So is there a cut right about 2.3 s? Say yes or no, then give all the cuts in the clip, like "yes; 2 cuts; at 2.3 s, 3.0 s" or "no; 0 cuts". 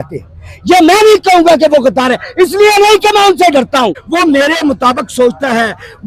no; 1 cut; at 4.0 s